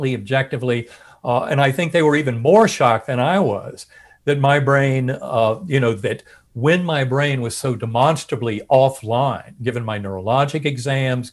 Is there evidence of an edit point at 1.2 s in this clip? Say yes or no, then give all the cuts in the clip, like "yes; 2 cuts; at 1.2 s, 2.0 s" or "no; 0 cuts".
no; 0 cuts